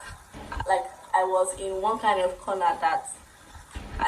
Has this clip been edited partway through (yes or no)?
no